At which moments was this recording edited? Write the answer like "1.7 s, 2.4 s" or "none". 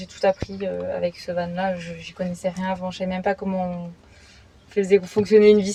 none